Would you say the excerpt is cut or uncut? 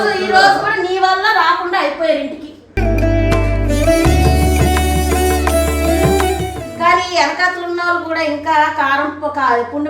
cut